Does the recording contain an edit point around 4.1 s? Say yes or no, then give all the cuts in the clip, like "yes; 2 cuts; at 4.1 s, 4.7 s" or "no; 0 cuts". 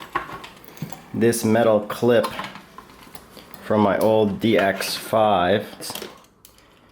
no; 1 cut; at 5.8 s